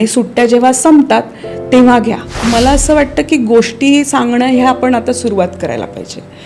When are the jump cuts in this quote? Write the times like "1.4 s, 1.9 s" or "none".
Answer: 2.3 s